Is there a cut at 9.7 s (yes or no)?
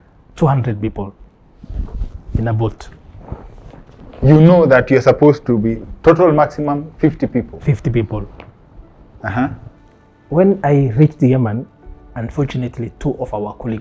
yes